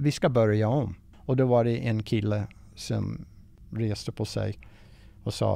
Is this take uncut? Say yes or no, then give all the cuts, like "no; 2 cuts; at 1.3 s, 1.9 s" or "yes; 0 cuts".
no; 1 cut; at 1.0 s